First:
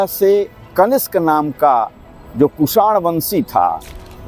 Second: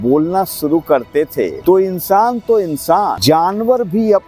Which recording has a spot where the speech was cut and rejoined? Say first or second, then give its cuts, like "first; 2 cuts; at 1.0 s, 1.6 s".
second; 2 cuts; at 1.5 s, 3.2 s